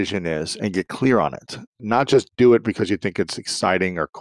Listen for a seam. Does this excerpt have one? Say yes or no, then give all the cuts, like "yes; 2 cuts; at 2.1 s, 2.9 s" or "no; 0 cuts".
yes; 1 cut; at 1.8 s